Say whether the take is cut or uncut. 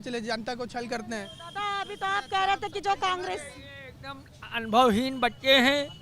uncut